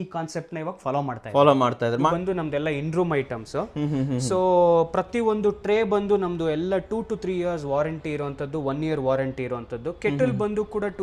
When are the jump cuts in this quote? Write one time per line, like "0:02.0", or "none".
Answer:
0:02.1